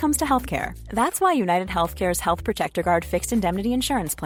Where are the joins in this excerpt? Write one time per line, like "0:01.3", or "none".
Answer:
none